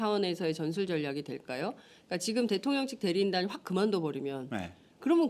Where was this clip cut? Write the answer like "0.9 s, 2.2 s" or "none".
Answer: none